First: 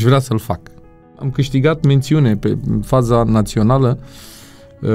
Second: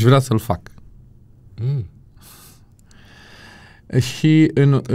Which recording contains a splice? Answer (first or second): first